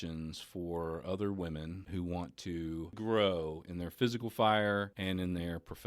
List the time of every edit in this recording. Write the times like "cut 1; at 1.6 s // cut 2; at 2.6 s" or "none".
cut 1; at 1.8 s // cut 2; at 3.0 s // cut 3; at 4.9 s